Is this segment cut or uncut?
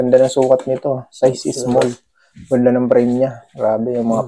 uncut